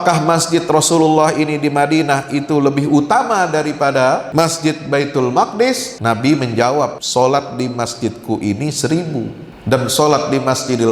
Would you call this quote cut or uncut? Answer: cut